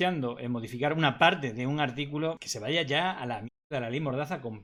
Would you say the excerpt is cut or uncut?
uncut